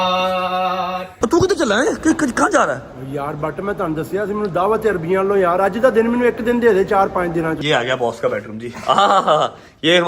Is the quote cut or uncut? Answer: cut